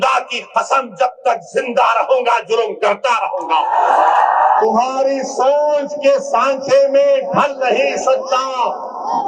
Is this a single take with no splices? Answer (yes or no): no